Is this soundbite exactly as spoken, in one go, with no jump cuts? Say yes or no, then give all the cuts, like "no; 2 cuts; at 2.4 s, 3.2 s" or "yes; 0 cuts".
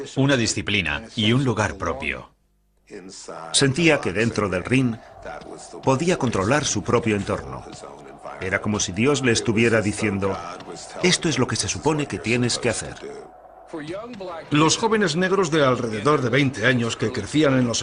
yes; 0 cuts